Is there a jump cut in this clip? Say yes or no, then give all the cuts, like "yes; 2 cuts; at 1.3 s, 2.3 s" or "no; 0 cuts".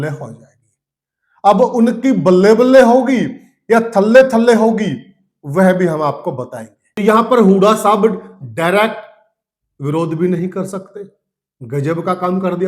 yes; 1 cut; at 6.8 s